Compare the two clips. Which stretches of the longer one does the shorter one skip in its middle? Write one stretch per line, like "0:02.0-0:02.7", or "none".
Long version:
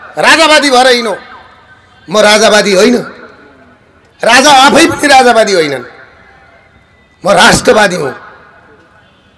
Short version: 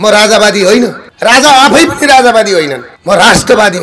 0:03.2-0:04.1
0:05.9-0:07.0